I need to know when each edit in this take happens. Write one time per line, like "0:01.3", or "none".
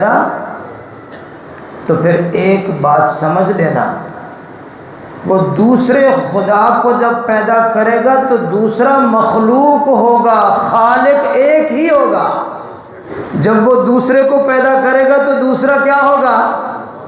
0:13.1